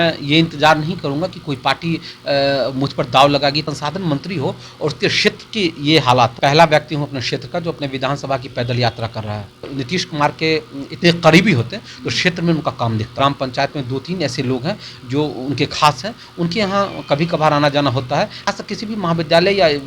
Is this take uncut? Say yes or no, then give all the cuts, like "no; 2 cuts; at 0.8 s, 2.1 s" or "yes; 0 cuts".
no; 5 cuts; at 3.7 s, 6.3 s, 9.7 s, 13.1 s, 18.5 s